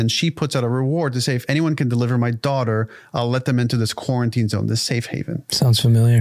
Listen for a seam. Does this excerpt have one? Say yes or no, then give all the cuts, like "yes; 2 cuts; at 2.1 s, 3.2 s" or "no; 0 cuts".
no; 0 cuts